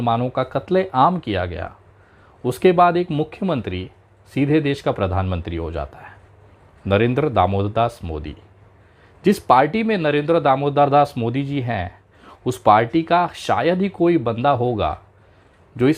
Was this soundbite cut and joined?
no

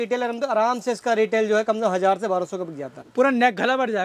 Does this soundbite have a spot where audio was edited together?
yes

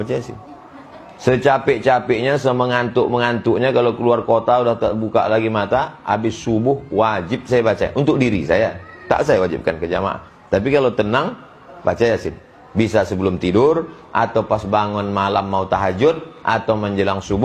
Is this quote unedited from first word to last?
yes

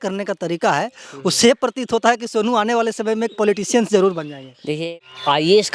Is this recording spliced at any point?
yes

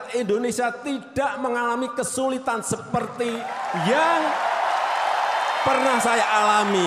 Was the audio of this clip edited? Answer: no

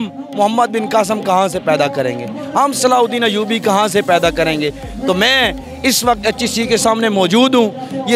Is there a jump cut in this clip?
no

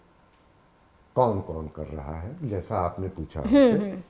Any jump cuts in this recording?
no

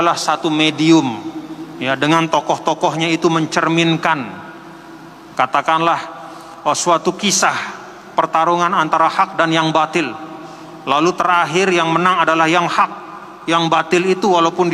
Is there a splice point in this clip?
no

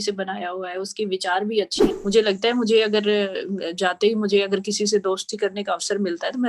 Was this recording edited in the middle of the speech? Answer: yes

